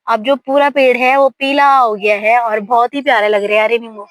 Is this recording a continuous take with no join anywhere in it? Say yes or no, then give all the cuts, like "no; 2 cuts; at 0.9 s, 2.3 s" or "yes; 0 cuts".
yes; 0 cuts